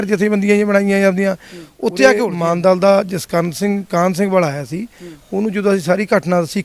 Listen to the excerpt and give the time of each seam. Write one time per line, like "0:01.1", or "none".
0:02.3